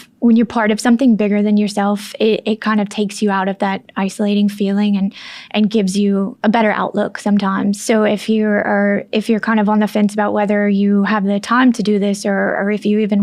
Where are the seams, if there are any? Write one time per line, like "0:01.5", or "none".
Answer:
0:06.3
0:07.8